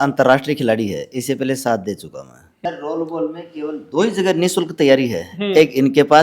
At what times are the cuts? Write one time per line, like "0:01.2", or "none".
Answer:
0:02.5